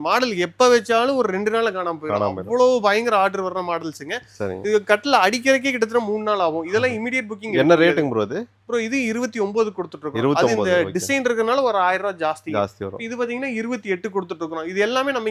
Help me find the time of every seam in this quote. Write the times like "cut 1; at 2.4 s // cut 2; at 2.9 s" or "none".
none